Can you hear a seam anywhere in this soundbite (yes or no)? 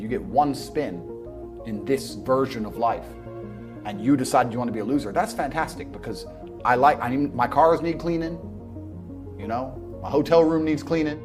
no